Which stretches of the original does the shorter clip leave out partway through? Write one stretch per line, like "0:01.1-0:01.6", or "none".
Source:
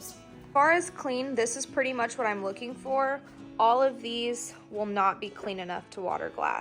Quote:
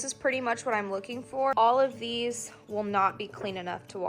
0:03.1-0:03.6